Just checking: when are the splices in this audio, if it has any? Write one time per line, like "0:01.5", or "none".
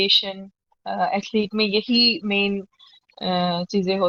none